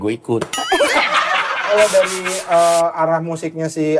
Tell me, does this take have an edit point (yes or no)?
yes